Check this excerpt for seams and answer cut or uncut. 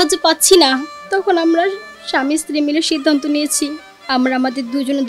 uncut